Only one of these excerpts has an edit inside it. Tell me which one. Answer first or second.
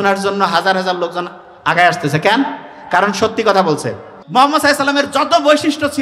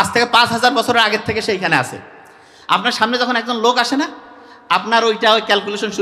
first